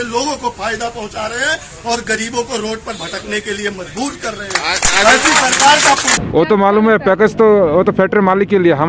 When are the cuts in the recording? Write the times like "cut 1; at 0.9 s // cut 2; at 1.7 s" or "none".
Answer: cut 1; at 6.2 s